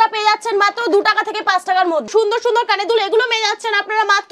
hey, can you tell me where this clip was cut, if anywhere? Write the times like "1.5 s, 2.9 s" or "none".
2.1 s